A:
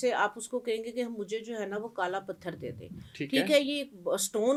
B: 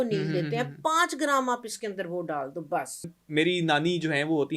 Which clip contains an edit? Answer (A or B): B